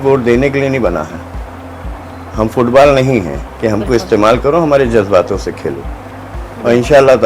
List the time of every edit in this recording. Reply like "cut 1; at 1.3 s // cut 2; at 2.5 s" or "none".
none